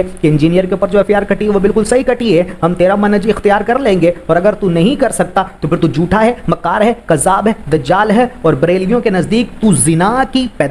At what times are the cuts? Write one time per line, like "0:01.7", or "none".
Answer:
none